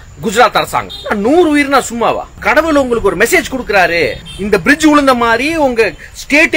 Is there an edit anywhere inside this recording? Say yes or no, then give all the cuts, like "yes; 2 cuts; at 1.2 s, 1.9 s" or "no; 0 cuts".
yes; 3 cuts; at 0.9 s, 2.3 s, 4.3 s